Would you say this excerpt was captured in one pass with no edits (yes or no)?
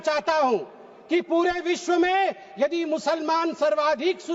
yes